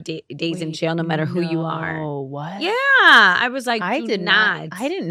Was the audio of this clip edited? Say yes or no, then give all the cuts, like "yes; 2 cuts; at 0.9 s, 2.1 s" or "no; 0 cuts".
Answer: no; 0 cuts